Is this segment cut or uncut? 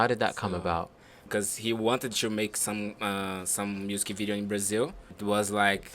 cut